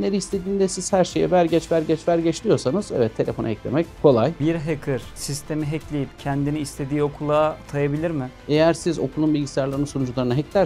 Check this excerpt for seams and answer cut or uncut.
cut